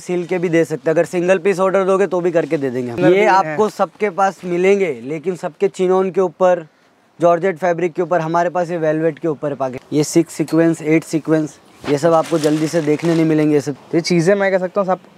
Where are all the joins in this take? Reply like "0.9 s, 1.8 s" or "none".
3.0 s, 9.8 s, 13.7 s